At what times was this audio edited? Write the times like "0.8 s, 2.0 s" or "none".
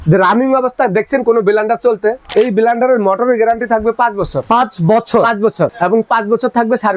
2.2 s, 4.4 s, 5.7 s